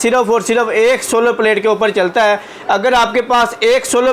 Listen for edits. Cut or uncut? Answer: uncut